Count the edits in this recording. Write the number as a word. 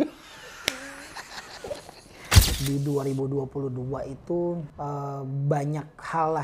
two